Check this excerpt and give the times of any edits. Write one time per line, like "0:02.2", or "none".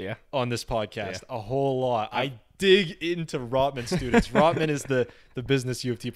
none